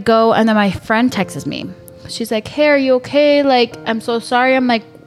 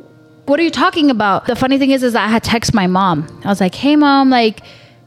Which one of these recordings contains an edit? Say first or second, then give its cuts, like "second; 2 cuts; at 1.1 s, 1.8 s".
second; 1 cut; at 1.5 s